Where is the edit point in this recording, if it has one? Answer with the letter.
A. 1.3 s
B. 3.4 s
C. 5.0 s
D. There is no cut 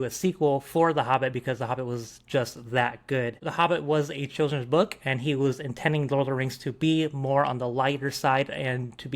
B